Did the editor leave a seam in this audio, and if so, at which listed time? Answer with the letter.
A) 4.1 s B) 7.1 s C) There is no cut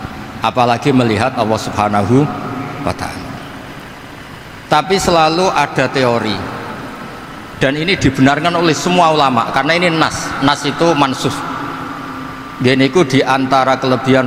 C